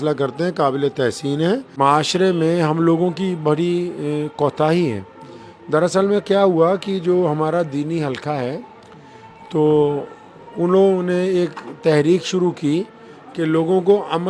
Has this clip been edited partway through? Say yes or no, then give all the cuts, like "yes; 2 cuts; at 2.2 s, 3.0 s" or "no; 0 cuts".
yes; 1 cut; at 1.7 s